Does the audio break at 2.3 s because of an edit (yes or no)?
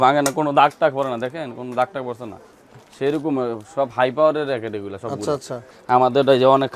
no